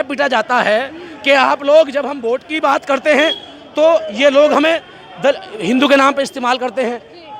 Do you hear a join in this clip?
no; 0 cuts

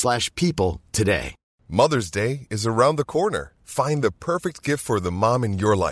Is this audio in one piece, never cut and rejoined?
no; 1 cut; at 1.6 s

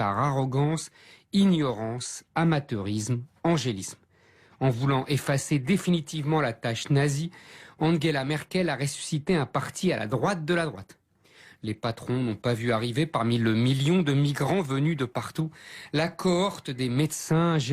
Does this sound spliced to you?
yes; 1 cut; at 11.1 s

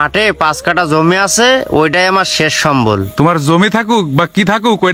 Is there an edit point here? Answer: no; 0 cuts

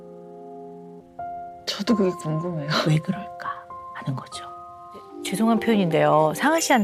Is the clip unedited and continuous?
no; 2 cuts; at 1.0 s, 5.2 s

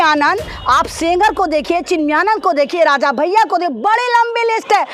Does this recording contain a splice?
no; 0 cuts

